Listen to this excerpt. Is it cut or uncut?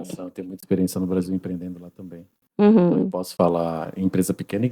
uncut